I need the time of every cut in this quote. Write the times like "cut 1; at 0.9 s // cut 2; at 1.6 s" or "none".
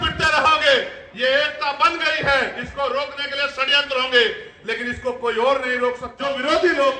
cut 1; at 6.1 s